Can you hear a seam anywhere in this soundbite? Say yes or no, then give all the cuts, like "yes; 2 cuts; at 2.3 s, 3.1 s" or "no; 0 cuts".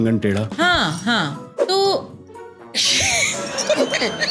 yes; 1 cut; at 1.5 s